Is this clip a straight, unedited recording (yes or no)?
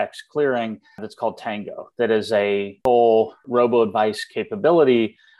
no